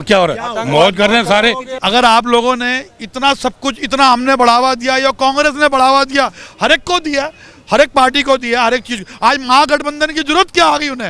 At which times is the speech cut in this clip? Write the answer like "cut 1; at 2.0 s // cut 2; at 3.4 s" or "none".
cut 1; at 1.7 s